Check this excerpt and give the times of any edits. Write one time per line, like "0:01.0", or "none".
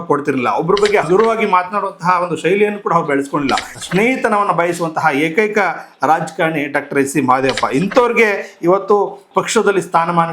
0:01.0
0:03.8